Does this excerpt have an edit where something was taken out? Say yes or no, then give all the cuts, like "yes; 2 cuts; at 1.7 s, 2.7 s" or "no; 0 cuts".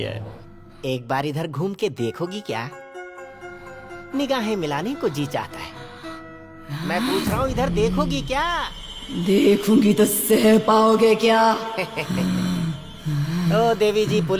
no; 0 cuts